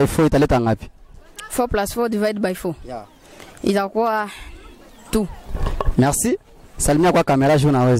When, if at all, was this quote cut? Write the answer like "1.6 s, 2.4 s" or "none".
none